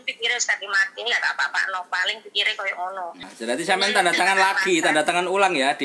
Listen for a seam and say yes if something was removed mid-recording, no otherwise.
yes